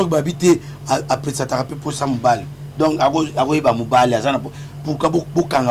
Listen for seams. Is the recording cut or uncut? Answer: uncut